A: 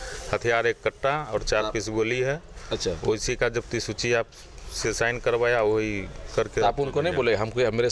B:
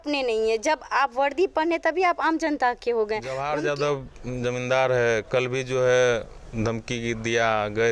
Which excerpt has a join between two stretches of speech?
B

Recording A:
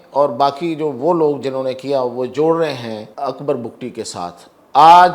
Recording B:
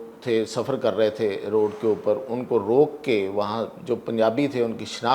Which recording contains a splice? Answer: A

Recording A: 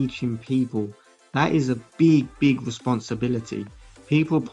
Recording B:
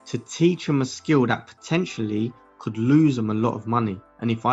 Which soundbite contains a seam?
A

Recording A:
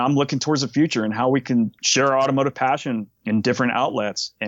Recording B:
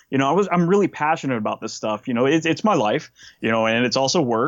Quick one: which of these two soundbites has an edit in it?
A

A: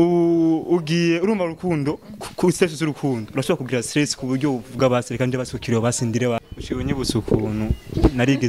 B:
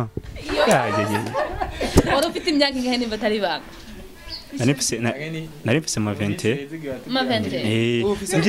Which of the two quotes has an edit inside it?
A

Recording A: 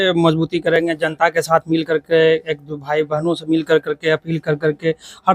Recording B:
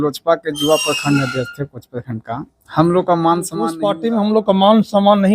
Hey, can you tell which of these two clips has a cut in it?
B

